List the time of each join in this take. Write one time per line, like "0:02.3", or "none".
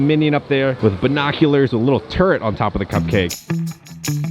none